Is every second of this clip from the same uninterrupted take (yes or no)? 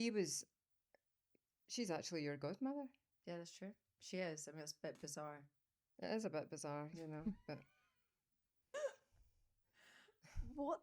no